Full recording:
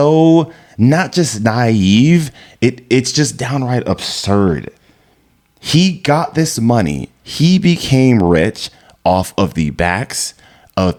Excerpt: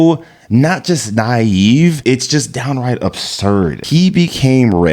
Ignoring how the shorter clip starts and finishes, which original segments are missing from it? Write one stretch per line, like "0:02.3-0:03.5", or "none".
0:02.3-0:02.8
0:04.6-0:07.3